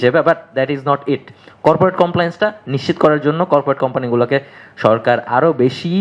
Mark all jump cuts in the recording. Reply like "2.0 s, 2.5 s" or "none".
none